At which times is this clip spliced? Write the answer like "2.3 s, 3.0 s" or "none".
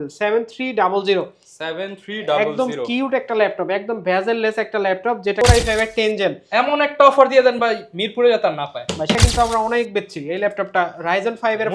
5.4 s, 9.2 s